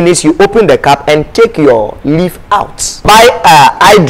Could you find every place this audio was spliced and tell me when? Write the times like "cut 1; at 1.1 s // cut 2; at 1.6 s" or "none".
cut 1; at 3.0 s